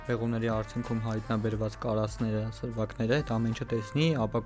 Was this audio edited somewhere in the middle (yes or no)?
no